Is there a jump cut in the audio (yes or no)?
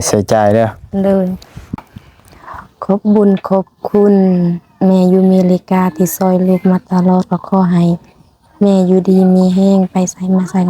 yes